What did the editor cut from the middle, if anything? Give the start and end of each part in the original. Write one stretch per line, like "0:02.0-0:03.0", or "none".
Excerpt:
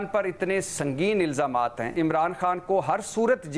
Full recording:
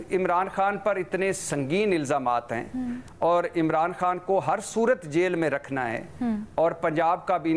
0:02.6-0:03.5